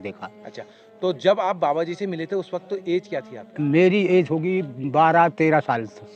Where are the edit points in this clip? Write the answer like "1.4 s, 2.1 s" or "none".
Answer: none